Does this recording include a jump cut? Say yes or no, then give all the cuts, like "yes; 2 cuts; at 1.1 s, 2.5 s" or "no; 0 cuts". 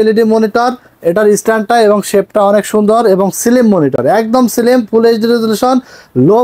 no; 0 cuts